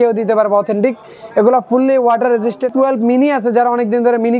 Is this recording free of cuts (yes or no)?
no